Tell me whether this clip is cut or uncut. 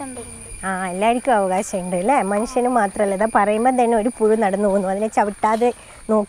uncut